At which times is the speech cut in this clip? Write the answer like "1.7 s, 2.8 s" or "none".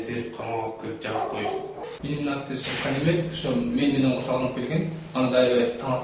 1.9 s

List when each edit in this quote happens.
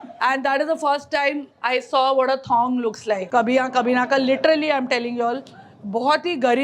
3.2 s

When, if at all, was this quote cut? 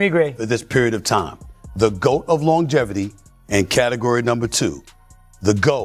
none

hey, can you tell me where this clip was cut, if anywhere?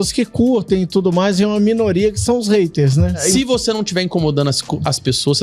3.2 s

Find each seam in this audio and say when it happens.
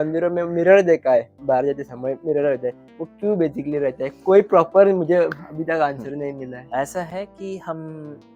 none

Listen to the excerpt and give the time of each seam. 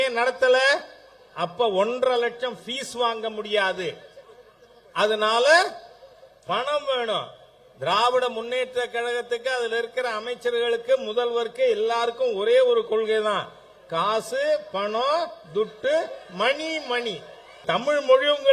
17.6 s

